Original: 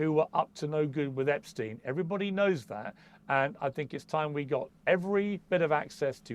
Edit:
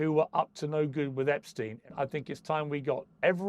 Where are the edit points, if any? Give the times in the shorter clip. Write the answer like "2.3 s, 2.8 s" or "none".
1.9 s